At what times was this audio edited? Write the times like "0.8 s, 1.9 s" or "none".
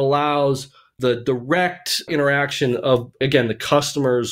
0.9 s, 2.1 s, 3.2 s